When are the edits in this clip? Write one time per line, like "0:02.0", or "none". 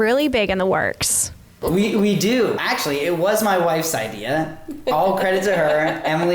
0:01.6
0:02.6